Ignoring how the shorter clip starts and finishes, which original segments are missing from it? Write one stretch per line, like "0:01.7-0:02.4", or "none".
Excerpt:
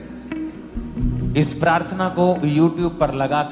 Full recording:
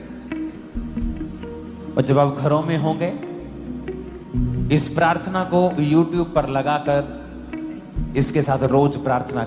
0:01.0-0:04.3